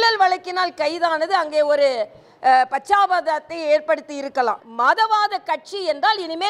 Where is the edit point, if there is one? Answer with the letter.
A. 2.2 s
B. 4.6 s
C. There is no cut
B